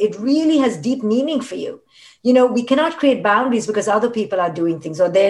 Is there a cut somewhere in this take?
no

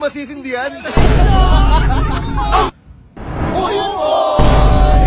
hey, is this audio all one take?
no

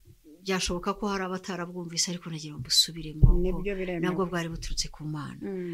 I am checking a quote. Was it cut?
no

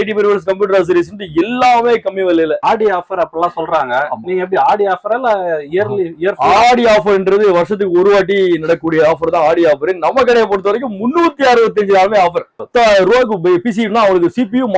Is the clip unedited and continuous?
no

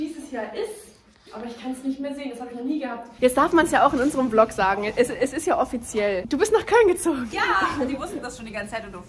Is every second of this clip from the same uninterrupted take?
no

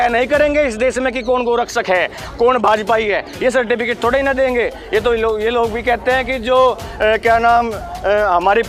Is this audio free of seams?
yes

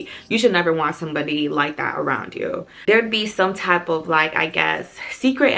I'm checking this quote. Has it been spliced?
yes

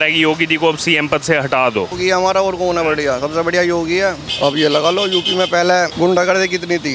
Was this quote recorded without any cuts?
no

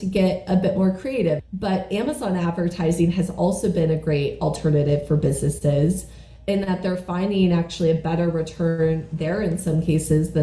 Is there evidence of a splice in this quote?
yes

